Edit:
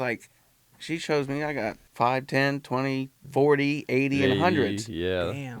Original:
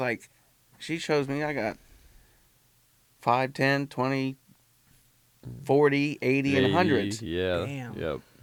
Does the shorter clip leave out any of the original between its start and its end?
yes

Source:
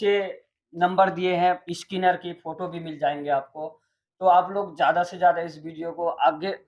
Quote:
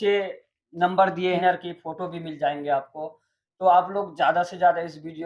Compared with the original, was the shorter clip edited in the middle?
yes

